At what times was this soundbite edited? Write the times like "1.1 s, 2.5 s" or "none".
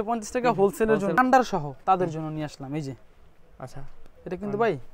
1.2 s